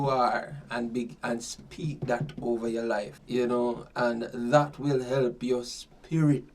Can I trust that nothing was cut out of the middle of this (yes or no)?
no